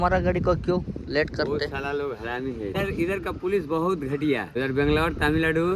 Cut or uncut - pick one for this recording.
cut